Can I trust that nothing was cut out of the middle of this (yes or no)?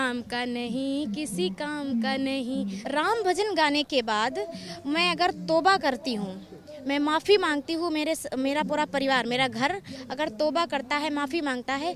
no